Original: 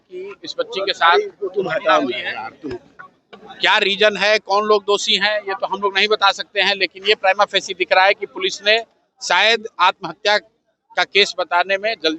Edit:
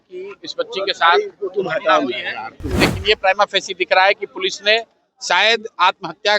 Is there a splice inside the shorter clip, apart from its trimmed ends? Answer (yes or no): yes